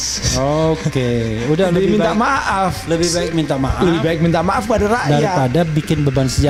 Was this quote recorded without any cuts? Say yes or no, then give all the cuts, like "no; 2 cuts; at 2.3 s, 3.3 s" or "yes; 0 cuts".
yes; 0 cuts